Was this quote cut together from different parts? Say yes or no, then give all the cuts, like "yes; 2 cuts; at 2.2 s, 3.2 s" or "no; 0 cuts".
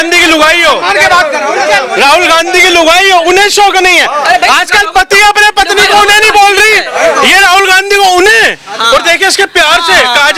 no; 0 cuts